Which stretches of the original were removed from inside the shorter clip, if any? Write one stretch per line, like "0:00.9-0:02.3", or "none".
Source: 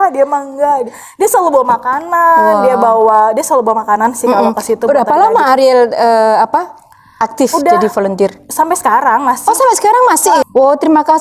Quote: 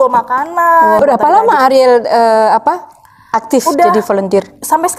0:02.5-0:04.9